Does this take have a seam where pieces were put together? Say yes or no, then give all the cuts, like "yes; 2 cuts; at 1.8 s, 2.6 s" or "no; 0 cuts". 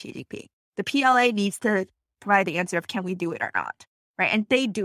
no; 0 cuts